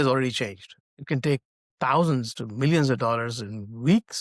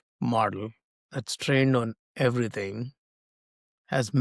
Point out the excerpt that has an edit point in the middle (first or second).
first